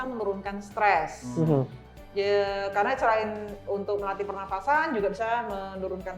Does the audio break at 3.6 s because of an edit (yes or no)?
no